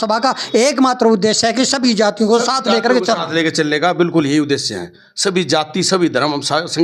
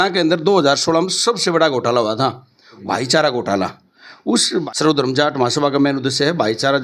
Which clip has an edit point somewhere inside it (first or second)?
second